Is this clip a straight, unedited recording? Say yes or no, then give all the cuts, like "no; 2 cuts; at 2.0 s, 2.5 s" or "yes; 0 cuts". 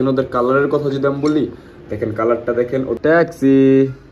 no; 1 cut; at 3.0 s